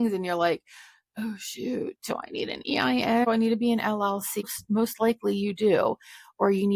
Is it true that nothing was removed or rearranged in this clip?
no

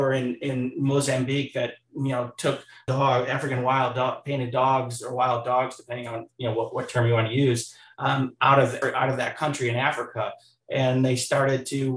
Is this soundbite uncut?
no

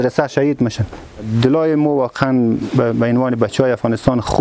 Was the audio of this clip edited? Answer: yes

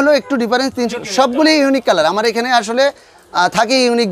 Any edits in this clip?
yes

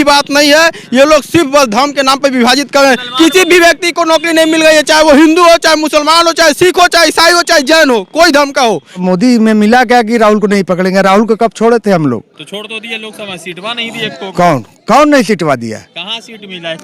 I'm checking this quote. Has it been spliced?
yes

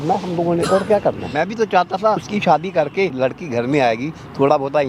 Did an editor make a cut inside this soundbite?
yes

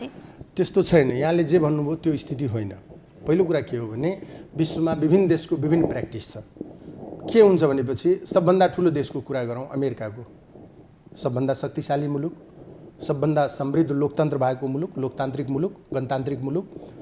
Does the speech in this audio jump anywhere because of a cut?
no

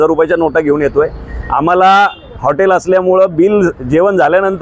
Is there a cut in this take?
no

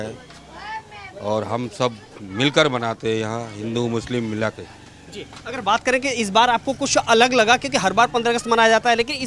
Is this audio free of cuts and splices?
yes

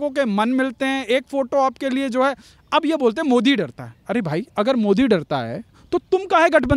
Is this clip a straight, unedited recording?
yes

